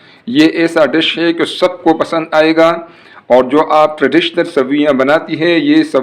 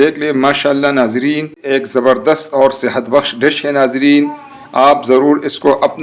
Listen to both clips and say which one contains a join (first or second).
second